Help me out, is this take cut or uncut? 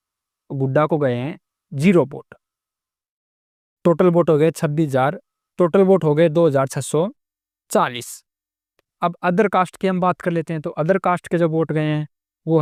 uncut